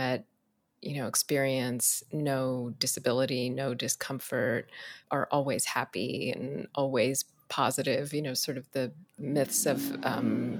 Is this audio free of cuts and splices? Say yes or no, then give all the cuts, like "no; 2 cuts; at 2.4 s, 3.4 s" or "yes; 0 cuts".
no; 2 cuts; at 4.9 s, 9.2 s